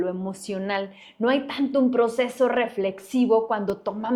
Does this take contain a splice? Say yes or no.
no